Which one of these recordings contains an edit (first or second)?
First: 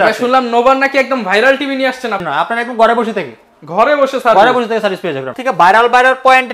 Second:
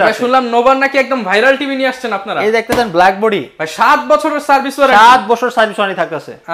first